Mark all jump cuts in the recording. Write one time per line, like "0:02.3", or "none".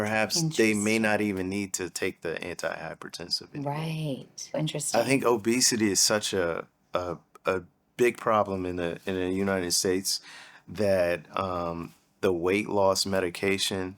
0:04.6
0:07.8